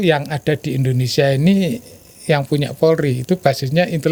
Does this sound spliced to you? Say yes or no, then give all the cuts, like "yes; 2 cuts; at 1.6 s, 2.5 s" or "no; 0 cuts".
no; 0 cuts